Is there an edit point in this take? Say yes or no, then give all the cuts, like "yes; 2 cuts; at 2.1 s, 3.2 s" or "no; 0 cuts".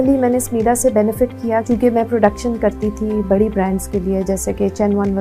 yes; 1 cut; at 1.6 s